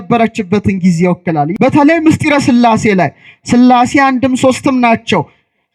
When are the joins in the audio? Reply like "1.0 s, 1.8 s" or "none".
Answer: 1.5 s